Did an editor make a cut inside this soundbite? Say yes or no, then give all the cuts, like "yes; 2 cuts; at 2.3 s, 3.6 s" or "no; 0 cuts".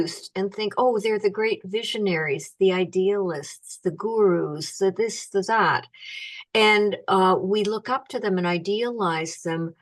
no; 0 cuts